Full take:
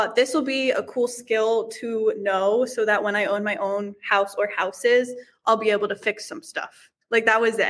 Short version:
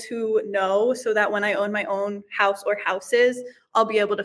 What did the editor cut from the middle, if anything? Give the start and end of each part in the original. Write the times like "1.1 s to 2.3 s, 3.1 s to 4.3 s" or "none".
none

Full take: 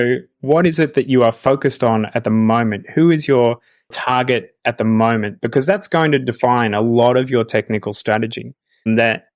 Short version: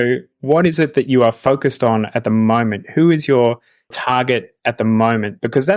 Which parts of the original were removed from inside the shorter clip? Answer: none

